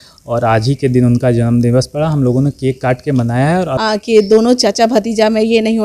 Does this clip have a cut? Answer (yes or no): yes